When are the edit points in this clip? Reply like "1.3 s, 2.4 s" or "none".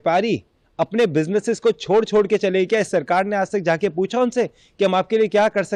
none